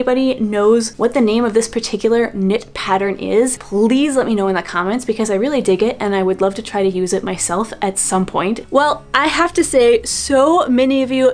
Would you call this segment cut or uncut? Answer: uncut